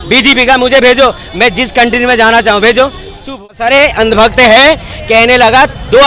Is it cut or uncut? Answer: cut